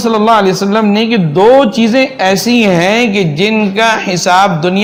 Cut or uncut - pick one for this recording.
uncut